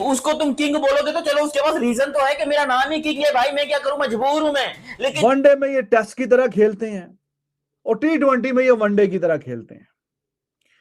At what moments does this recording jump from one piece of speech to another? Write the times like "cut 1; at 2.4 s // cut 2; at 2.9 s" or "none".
cut 1; at 5.2 s

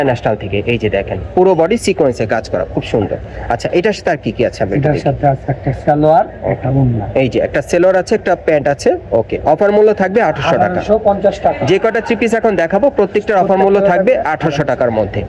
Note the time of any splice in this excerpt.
none

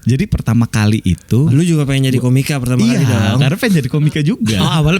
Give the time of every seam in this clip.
cut 1; at 1.5 s

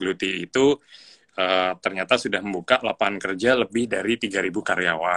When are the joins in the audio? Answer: none

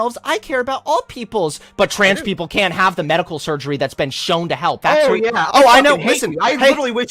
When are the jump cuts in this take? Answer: cut 1; at 4.8 s

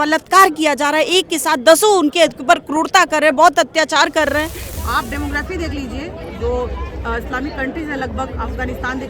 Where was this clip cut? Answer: cut 1; at 4.6 s

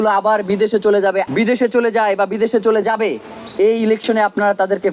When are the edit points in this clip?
cut 1; at 1.3 s

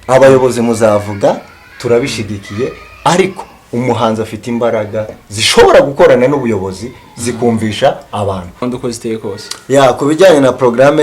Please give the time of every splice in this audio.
cut 1; at 8.7 s

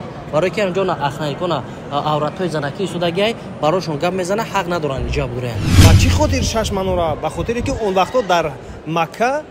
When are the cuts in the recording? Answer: cut 1; at 5.7 s

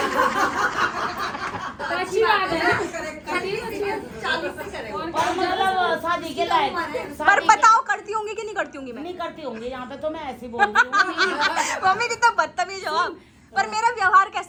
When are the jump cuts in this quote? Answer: none

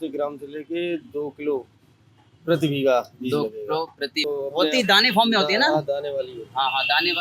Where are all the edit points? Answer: cut 1; at 4.2 s

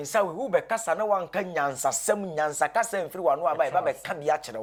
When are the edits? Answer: none

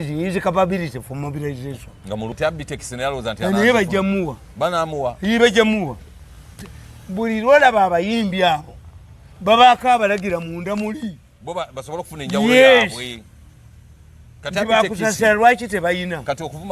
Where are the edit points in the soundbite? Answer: cut 1; at 2.3 s

